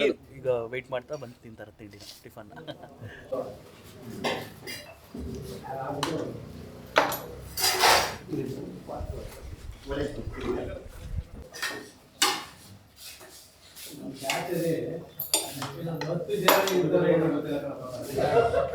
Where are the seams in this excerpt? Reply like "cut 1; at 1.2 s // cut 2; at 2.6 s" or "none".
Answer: none